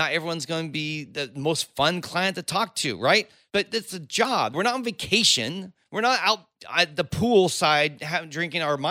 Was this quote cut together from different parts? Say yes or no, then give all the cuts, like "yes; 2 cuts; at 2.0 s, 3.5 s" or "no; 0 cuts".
yes; 3 cuts; at 3.4 s, 4.5 s, 6.6 s